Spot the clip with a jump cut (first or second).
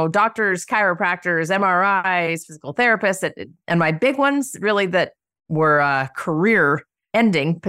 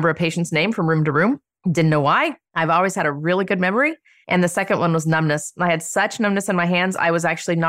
first